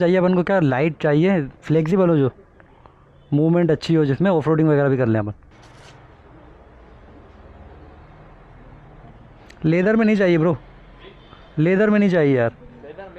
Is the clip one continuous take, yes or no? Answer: no